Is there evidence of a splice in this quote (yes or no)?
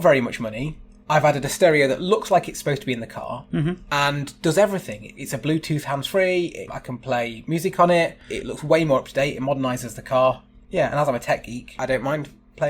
yes